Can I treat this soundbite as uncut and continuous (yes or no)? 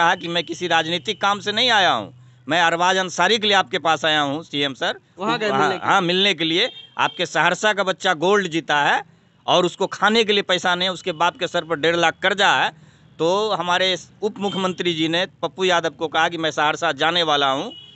yes